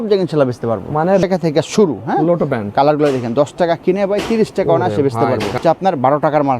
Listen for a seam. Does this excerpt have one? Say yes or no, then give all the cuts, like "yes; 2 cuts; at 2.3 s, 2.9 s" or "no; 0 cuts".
yes; 2 cuts; at 1.2 s, 5.6 s